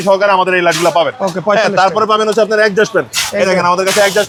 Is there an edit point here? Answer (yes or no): no